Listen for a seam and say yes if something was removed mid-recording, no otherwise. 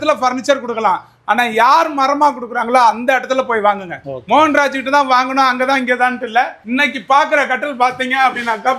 no